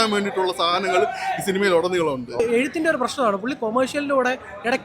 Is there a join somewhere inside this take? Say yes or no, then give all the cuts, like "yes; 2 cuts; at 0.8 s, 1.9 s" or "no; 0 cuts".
yes; 1 cut; at 2.4 s